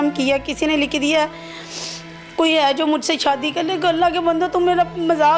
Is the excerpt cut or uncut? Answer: uncut